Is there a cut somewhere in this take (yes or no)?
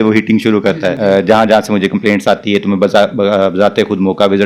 yes